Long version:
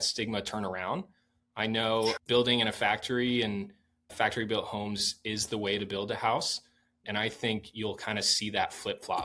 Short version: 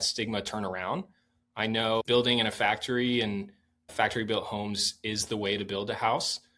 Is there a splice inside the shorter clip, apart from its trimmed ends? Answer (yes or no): yes